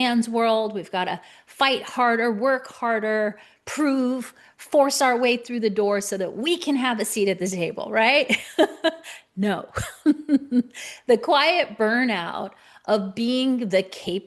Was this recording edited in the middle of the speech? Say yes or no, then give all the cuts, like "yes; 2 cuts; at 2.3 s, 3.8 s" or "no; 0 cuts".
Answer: no; 0 cuts